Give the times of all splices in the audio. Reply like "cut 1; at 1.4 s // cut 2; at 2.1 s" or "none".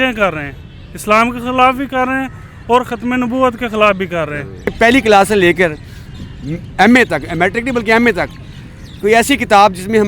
none